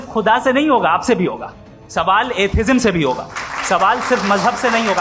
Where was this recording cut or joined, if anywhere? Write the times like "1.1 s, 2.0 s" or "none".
none